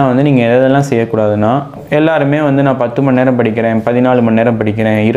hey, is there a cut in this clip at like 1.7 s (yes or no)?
yes